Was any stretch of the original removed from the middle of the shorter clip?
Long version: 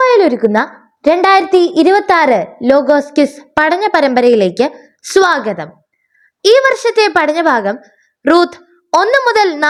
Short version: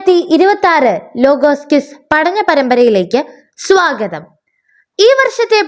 no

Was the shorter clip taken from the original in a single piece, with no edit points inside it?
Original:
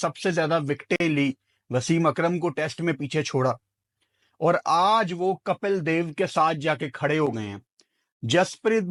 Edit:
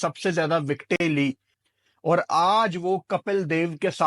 no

